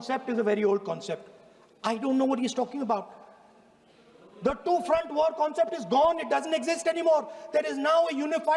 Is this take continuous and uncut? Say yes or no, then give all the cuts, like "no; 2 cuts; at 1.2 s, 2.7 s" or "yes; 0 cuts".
yes; 0 cuts